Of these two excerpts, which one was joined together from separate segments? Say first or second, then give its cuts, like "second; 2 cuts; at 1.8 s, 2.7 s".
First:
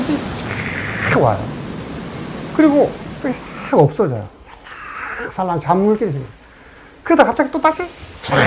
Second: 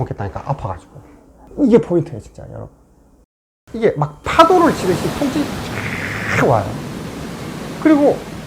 second; 1 cut; at 3.3 s